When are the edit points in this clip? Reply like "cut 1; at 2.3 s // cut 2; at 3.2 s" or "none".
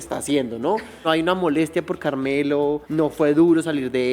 cut 1; at 1.1 s // cut 2; at 2.8 s